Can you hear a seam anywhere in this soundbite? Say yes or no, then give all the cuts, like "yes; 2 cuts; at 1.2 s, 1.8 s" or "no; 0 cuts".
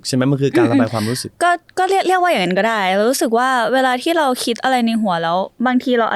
no; 0 cuts